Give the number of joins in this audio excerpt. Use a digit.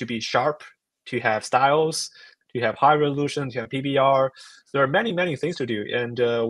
0